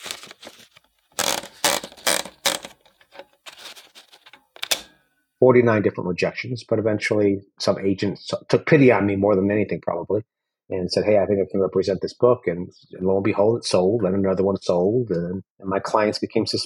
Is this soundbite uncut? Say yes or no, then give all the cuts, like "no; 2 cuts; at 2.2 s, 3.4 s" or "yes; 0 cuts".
no; 1 cut; at 5.3 s